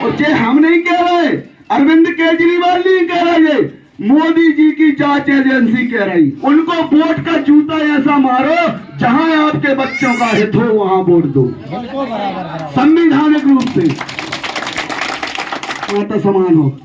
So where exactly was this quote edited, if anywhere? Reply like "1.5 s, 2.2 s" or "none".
6.4 s, 15.9 s